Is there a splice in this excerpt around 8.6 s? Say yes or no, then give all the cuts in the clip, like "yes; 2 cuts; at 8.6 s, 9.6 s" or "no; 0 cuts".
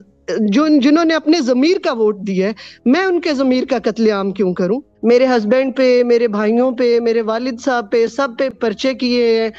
yes; 2 cuts; at 4.9 s, 8.6 s